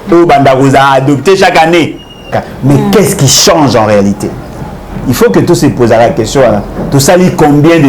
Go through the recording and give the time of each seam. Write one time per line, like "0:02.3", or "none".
0:02.4